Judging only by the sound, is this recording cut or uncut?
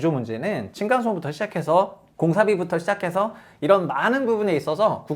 cut